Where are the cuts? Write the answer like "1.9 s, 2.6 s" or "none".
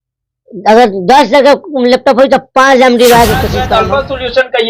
3.6 s